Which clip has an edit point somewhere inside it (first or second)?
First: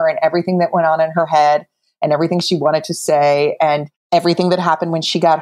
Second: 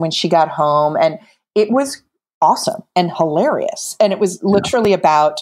first